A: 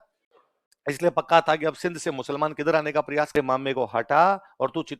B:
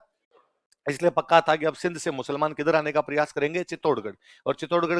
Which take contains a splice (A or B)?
A